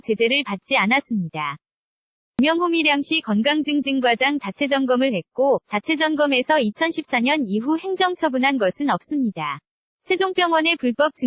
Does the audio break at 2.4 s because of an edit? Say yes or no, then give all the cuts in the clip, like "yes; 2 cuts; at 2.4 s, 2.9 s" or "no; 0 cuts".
yes; 1 cut; at 2.4 s